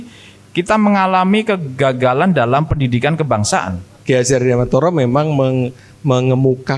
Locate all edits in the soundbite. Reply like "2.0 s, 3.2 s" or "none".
3.9 s